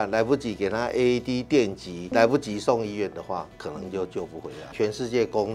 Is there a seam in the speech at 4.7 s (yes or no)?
yes